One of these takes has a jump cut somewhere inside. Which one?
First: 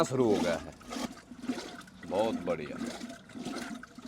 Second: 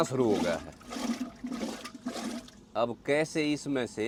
first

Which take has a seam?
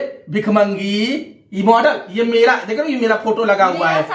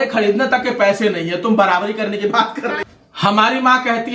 second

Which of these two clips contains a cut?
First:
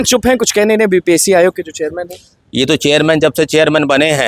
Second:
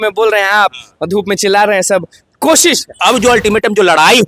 second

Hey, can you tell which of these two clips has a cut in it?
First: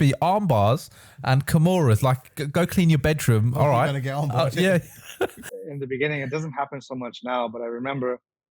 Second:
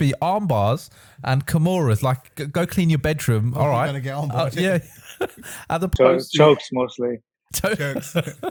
first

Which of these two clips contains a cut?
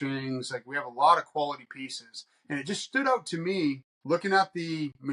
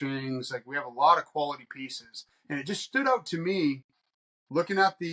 first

